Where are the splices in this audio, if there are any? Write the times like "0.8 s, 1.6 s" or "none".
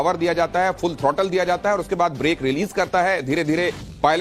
1.9 s